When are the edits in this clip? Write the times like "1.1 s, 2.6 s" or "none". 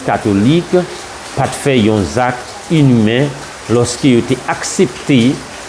none